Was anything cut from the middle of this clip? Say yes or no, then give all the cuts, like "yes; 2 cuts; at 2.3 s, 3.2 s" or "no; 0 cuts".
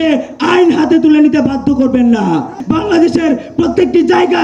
yes; 1 cut; at 2.6 s